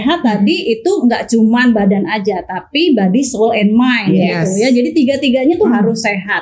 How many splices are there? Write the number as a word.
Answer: zero